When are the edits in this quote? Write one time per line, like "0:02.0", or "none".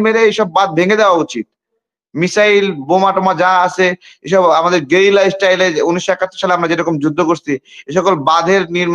none